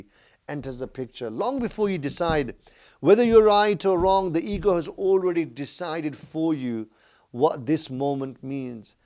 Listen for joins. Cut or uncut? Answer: uncut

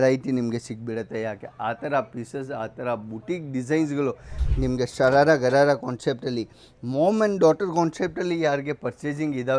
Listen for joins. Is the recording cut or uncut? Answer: cut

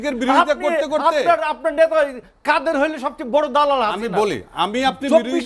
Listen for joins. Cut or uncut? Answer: uncut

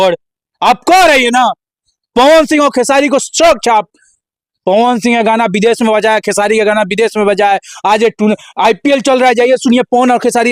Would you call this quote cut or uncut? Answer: uncut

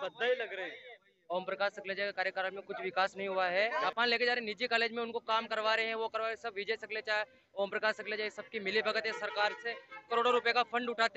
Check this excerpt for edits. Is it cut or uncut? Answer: cut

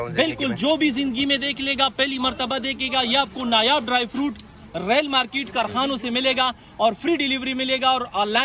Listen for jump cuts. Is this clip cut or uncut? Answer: uncut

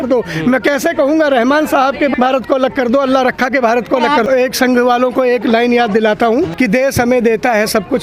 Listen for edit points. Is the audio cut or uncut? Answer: cut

